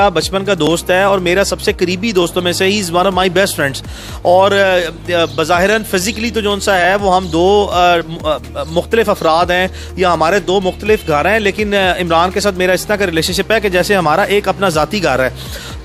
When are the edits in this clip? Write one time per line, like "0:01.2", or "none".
none